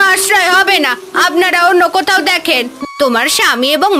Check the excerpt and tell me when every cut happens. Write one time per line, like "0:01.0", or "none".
0:02.8